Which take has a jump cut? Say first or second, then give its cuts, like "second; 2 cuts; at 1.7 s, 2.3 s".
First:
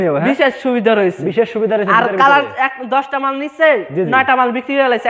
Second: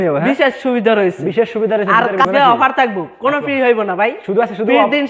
second; 1 cut; at 2.2 s